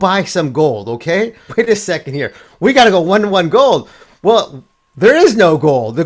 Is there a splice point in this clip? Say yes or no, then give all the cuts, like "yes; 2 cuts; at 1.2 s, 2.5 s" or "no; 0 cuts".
yes; 1 cut; at 1.5 s